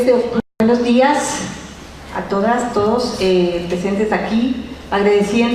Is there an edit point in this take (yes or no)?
yes